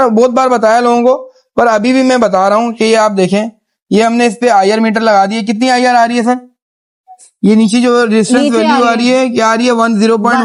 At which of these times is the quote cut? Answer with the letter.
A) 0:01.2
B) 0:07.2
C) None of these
C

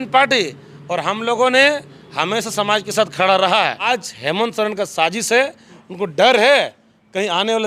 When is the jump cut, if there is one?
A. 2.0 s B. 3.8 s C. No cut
B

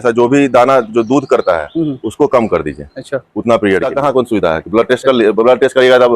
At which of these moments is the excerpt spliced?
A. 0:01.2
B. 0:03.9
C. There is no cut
B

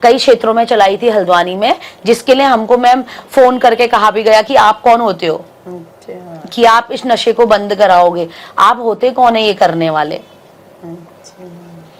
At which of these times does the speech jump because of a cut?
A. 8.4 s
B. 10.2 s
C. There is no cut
C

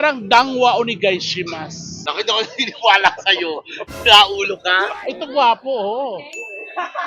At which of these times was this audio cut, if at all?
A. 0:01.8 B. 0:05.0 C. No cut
B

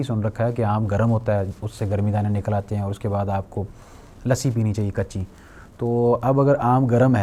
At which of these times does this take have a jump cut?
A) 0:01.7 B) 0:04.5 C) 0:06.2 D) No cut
D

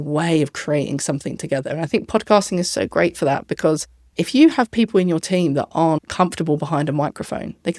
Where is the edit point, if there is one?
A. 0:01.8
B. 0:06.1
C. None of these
C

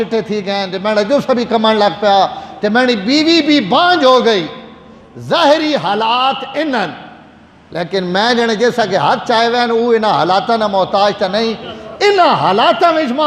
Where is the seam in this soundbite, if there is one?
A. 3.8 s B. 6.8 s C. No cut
C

